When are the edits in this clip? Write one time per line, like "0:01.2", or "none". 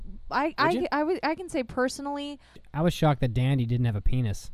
0:02.7